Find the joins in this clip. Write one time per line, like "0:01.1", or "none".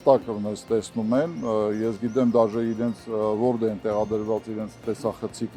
none